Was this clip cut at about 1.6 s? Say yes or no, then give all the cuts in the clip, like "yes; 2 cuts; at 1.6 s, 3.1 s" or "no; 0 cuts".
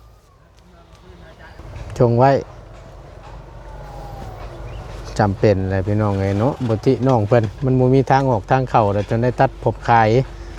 yes; 1 cut; at 1.6 s